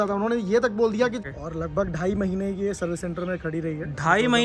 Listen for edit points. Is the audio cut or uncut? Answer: cut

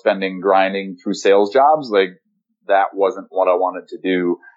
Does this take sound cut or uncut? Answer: uncut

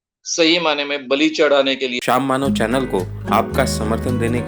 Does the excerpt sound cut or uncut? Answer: cut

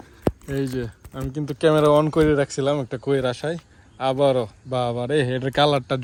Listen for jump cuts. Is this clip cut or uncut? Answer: uncut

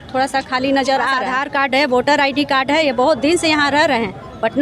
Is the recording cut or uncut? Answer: cut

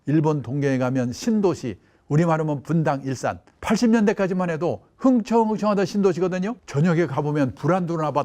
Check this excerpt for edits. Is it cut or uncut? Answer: cut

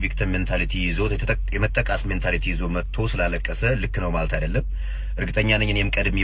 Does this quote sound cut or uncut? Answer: uncut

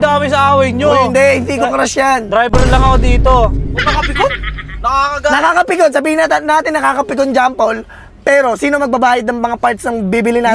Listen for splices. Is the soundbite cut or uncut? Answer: uncut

